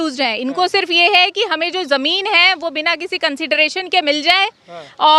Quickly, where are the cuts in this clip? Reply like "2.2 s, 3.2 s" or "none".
none